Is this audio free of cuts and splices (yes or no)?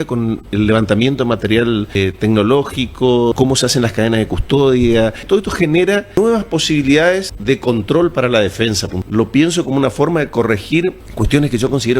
no